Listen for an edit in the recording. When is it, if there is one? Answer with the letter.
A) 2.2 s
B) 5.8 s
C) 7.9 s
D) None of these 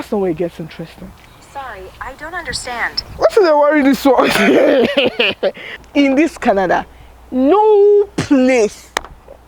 B